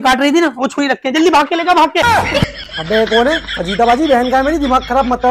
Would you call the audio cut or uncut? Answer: cut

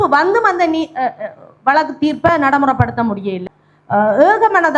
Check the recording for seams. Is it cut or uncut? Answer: cut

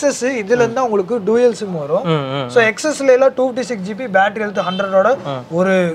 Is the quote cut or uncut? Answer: uncut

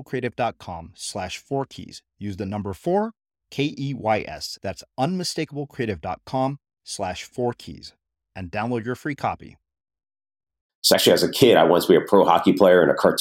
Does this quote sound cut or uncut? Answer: cut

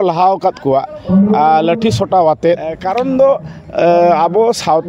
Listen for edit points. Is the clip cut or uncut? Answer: cut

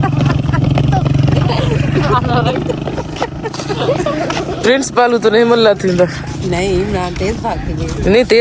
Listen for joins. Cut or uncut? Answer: uncut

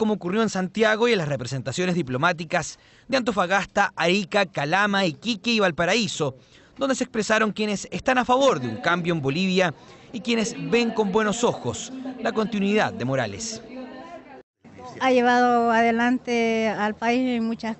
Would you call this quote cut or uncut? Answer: cut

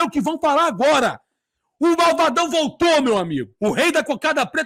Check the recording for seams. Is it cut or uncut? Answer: uncut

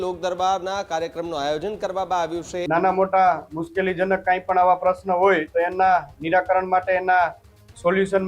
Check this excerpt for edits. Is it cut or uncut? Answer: cut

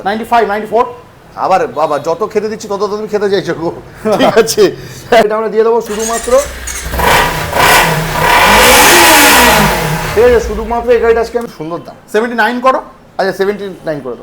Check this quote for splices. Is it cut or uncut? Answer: cut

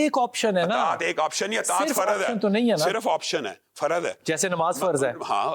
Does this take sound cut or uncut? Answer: uncut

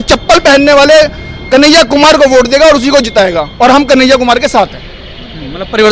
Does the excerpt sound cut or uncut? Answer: uncut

